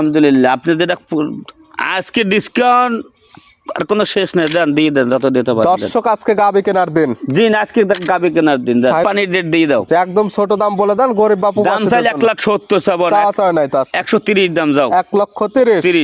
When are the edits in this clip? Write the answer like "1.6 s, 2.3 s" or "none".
9.1 s